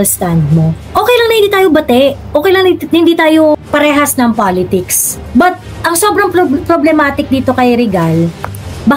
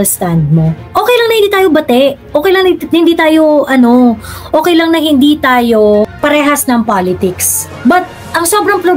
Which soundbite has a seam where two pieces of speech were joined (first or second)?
first